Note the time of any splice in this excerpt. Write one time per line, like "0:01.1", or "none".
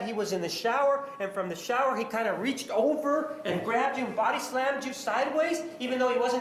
none